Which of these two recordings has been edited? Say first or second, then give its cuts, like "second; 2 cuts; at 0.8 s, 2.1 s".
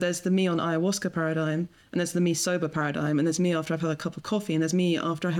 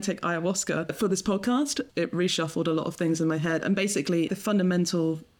second; 3 cuts; at 0.9 s, 1.9 s, 4.3 s